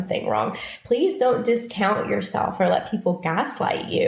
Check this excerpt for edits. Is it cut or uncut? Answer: uncut